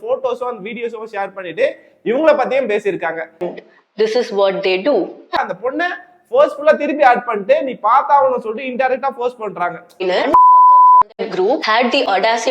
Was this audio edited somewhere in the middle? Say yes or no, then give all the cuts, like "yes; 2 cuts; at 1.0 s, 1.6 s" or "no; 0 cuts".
yes; 3 cuts; at 3.5 s, 5.4 s, 10.0 s